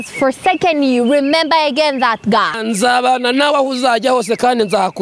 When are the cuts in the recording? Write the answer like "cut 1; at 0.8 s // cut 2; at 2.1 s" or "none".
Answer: cut 1; at 2.6 s